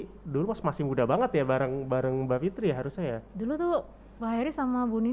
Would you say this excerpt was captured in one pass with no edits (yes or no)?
yes